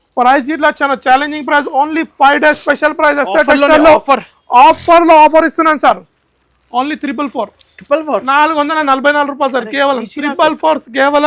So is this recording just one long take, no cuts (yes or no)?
yes